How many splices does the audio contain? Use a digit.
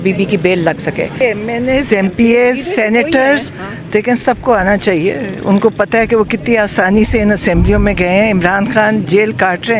1